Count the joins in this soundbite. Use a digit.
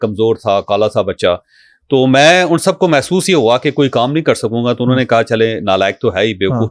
0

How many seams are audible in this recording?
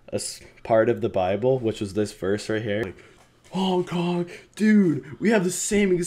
1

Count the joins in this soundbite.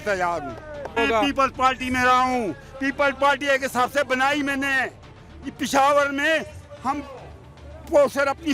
1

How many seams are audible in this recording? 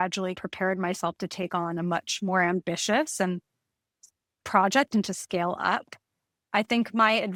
0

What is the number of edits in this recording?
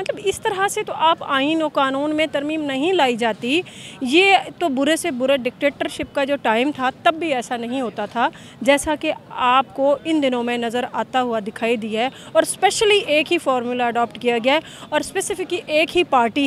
0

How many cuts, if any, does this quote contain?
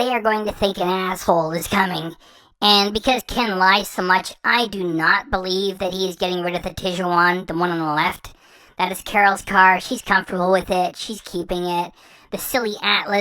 0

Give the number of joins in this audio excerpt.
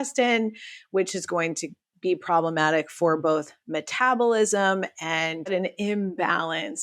1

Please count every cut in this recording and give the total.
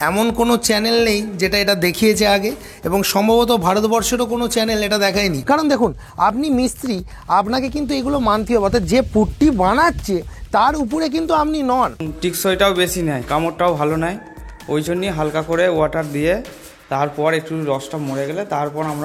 2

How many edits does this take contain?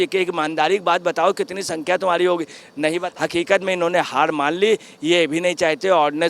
1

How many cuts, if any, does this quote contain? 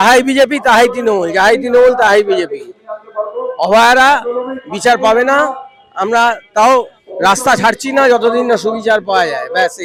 0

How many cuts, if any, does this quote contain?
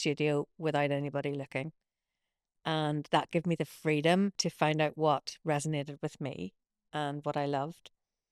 1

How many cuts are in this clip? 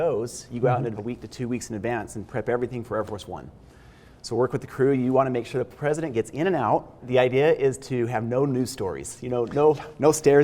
2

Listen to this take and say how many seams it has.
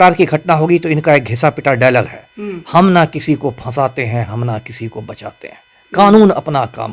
0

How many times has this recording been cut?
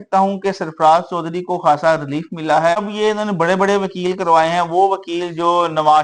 1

